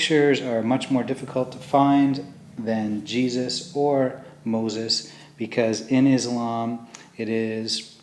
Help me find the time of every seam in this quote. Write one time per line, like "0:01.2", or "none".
none